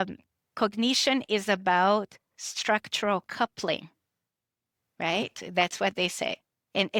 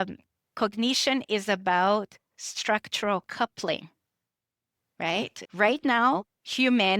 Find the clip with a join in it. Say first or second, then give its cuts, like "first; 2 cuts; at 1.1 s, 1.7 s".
second; 1 cut; at 5.4 s